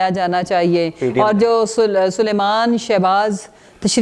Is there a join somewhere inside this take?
no; 0 cuts

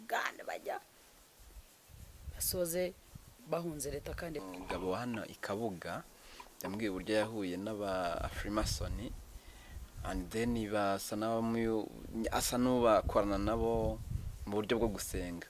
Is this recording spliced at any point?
yes; 1 cut; at 4.4 s

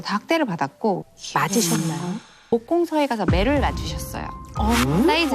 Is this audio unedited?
no; 2 cuts; at 1.0 s, 2.5 s

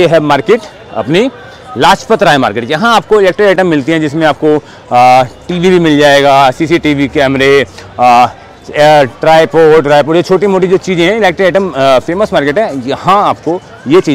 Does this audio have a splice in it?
no; 0 cuts

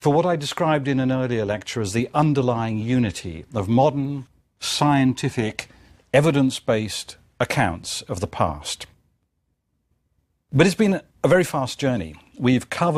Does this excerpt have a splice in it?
no; 0 cuts

